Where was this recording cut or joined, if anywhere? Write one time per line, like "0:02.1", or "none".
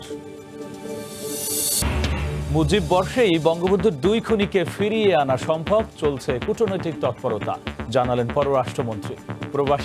0:01.8